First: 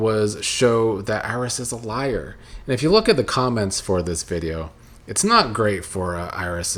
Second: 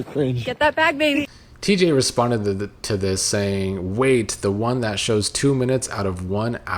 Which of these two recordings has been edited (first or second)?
second